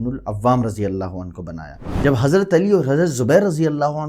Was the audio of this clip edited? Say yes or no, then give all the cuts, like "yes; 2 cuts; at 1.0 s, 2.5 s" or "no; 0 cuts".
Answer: yes; 1 cut; at 1.8 s